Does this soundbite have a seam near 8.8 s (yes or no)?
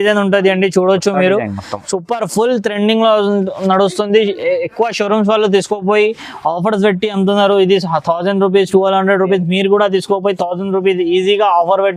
no